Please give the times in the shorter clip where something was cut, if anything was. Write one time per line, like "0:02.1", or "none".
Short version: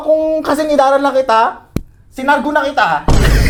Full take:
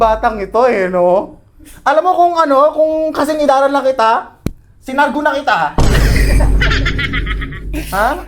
none